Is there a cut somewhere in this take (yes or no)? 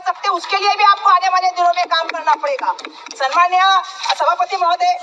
no